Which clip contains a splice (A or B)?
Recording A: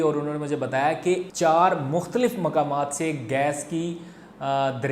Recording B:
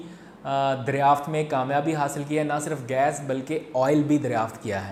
A